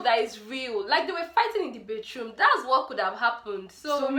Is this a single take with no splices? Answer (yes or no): yes